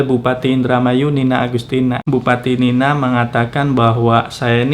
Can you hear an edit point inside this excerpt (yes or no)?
yes